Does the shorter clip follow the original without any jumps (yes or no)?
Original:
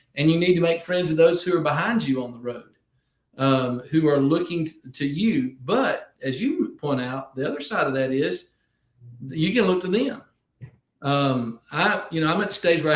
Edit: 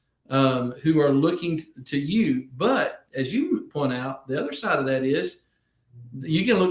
yes